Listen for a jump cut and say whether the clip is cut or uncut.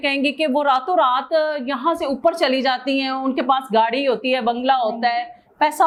uncut